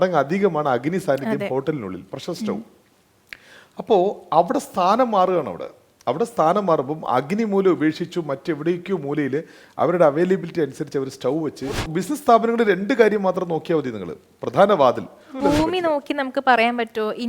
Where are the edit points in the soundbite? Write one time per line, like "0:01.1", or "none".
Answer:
0:11.8
0:15.4